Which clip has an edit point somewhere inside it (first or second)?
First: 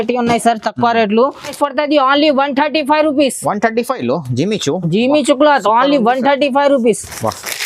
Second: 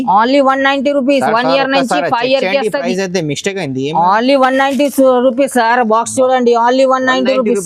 first